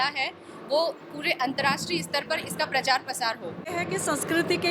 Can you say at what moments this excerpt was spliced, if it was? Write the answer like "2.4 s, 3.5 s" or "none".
3.7 s